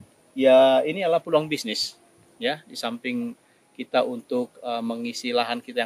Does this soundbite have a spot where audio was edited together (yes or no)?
no